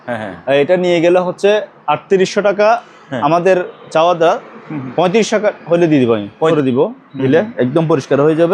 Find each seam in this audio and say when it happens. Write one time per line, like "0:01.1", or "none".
0:06.5